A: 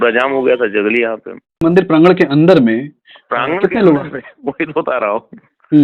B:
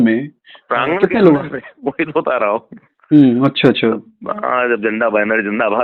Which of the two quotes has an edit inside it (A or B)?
A